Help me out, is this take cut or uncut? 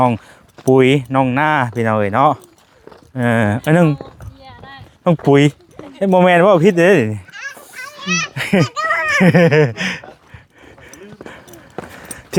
uncut